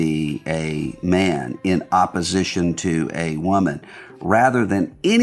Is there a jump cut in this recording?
no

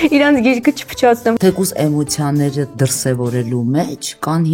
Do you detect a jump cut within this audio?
yes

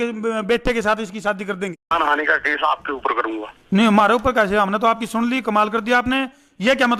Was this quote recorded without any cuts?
no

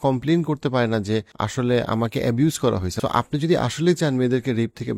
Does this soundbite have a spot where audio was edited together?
yes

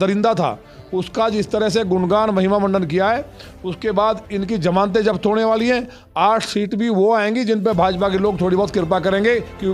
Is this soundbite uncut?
yes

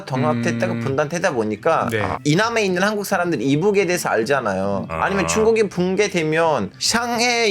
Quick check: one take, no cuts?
no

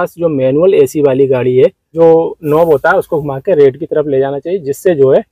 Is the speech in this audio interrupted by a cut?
yes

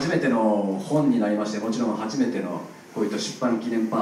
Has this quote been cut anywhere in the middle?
no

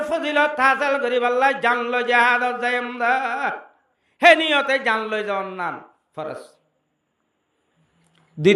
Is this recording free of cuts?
yes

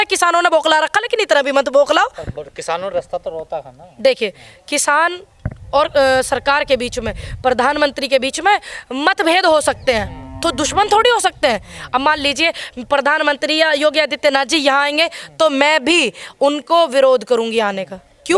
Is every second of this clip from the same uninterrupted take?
yes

